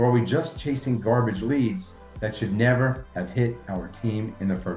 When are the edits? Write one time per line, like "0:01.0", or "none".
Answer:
none